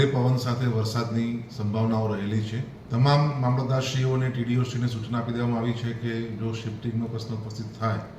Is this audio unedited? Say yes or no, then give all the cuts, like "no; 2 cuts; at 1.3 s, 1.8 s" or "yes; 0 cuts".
no; 1 cut; at 2.7 s